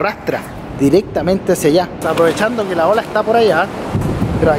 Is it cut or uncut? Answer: cut